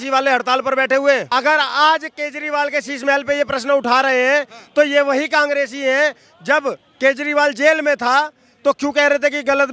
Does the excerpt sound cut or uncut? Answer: cut